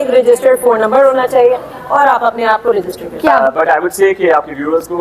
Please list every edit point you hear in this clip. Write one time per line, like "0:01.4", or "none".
0:03.3